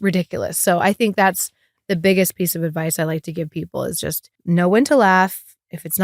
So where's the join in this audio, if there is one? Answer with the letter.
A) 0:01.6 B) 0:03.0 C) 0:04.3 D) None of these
C